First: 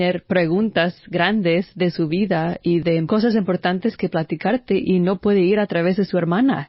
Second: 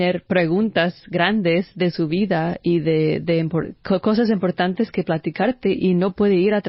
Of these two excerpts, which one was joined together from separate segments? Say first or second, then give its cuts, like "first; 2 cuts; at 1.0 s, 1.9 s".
first; 1 cut; at 2.8 s